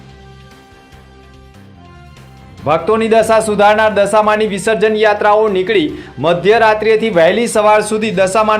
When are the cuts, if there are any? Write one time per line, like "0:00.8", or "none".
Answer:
0:02.1